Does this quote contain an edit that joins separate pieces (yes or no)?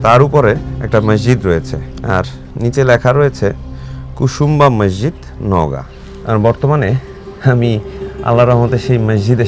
no